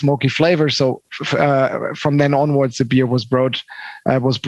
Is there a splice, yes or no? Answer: no